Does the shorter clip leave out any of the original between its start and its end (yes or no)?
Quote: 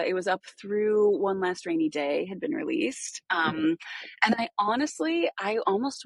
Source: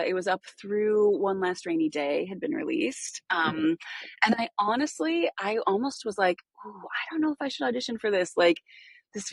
no